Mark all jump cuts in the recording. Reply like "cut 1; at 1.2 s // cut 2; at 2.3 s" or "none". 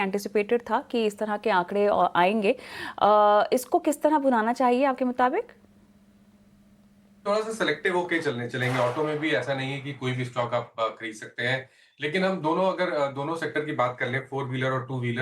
cut 1; at 14.0 s